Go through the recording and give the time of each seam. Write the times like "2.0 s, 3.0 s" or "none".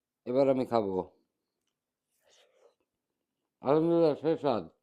3.6 s